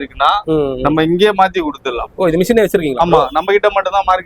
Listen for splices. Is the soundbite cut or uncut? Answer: uncut